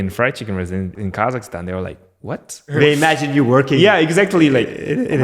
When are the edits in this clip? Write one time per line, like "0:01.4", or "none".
0:00.9
0:02.7